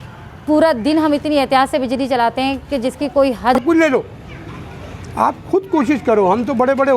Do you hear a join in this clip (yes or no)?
yes